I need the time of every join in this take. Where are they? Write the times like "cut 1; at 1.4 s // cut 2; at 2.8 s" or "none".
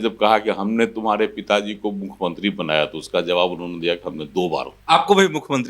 cut 1; at 4.7 s